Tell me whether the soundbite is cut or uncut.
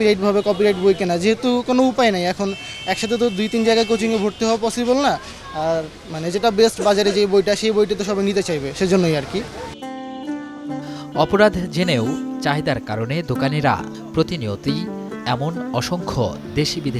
uncut